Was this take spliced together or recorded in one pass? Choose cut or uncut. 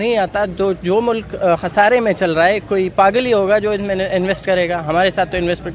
uncut